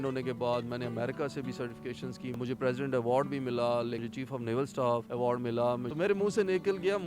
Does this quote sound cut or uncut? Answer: cut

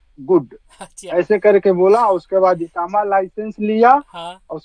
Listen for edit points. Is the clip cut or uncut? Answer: uncut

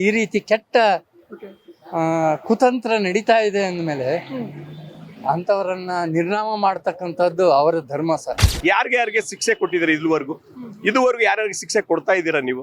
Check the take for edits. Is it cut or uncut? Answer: cut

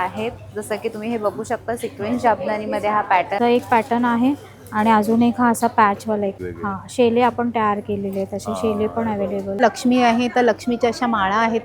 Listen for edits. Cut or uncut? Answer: cut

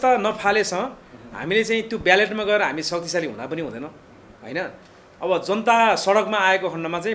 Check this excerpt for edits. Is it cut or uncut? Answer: uncut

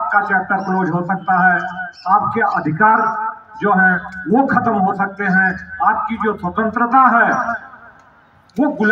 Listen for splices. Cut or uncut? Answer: uncut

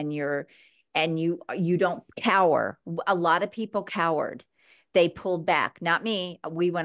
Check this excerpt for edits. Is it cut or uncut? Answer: uncut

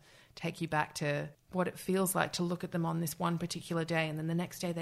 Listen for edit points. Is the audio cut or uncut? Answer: cut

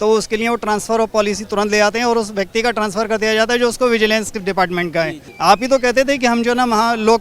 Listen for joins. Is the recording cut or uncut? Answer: cut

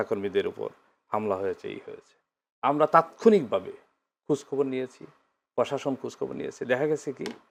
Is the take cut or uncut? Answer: uncut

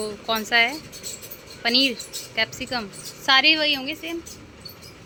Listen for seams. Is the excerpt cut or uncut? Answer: uncut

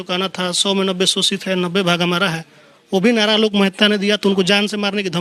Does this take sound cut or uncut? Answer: uncut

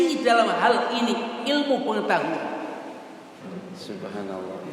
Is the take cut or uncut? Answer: cut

